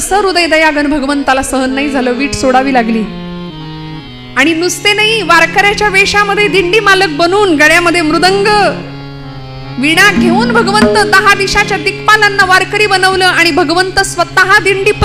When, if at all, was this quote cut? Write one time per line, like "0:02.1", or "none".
none

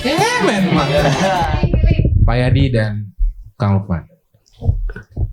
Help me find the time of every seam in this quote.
0:01.5

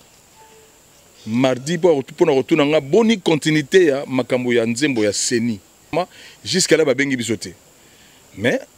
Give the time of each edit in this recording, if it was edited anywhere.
0:05.9

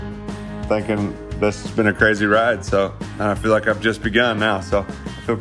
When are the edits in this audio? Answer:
none

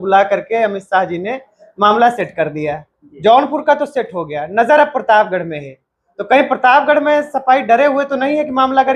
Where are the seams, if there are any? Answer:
none

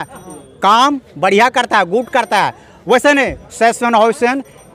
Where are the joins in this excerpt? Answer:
none

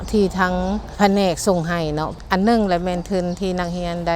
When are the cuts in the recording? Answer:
0:00.9
0:02.1

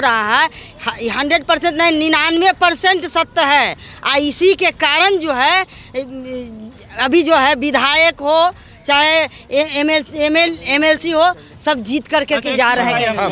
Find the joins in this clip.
none

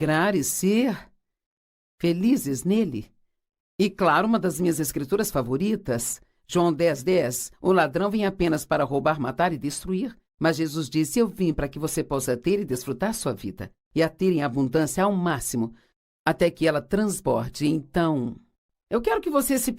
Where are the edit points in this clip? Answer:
0:15.2

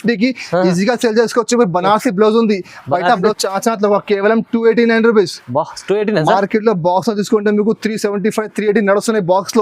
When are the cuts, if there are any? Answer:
0:03.3

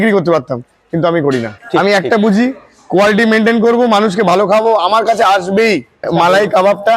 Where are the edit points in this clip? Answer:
0:01.6
0:06.1

